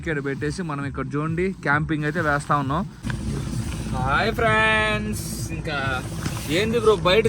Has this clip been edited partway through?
yes; 1 cut; at 3.0 s

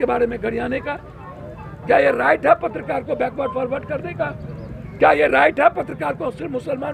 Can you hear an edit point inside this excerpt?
no; 0 cuts

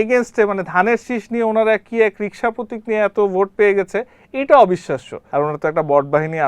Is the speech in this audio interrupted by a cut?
yes; 1 cut; at 5.2 s

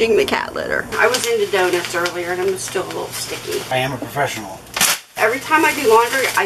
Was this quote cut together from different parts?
yes; 3 cuts; at 0.9 s, 3.7 s, 5.2 s

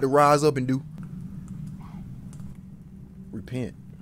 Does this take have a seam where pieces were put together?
yes; 1 cut; at 1.0 s

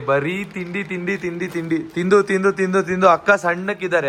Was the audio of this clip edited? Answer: no; 0 cuts

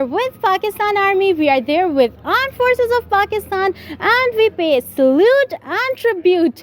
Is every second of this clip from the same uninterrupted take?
yes; 0 cuts

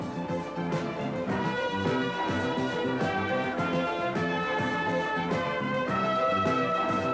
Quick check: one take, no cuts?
yes; 0 cuts

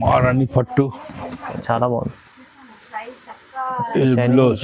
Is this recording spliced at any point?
yes; 1 cut; at 1.6 s

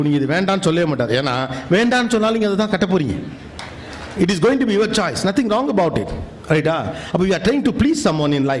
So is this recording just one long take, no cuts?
yes; 0 cuts

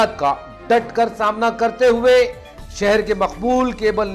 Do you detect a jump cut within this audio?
no; 0 cuts

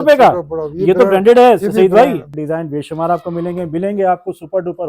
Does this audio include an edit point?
yes; 1 cut; at 2.3 s

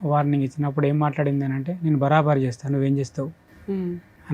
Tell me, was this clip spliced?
no; 0 cuts

